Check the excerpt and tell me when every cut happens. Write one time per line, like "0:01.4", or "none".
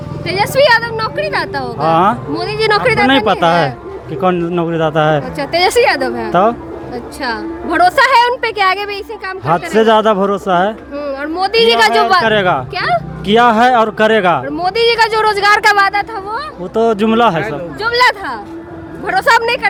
none